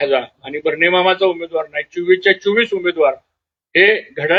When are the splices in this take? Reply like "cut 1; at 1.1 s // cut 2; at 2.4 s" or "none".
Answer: none